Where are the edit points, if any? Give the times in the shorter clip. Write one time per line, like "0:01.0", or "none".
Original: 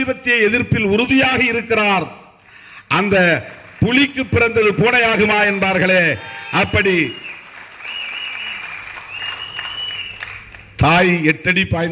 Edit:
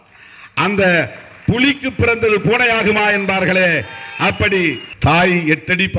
0:04.9